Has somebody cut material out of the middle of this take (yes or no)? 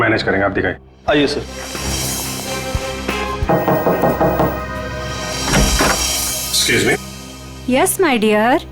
yes